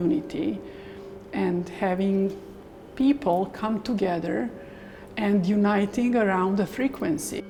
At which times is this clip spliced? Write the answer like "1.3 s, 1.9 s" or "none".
none